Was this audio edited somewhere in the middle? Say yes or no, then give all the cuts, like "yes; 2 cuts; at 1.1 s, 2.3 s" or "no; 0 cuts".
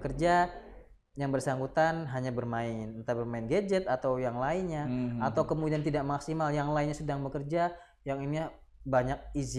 no; 0 cuts